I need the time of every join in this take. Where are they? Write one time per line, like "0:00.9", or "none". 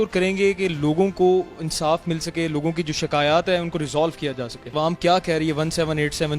0:04.5